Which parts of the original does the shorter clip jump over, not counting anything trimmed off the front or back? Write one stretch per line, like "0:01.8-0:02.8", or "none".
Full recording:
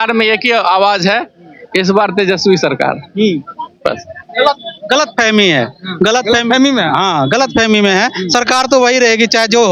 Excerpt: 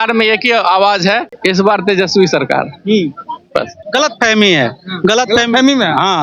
0:01.3-0:01.6
0:04.1-0:04.7